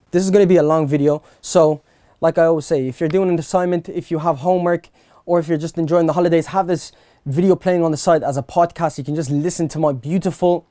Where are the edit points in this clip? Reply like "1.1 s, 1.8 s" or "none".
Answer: none